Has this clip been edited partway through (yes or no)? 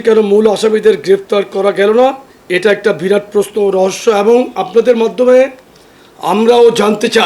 no